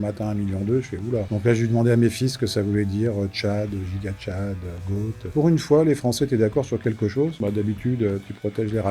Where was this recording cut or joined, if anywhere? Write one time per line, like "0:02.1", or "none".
0:01.3
0:05.3
0:07.4